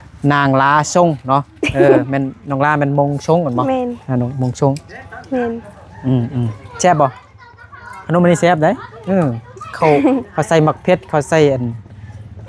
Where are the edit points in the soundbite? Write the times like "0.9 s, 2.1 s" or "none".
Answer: none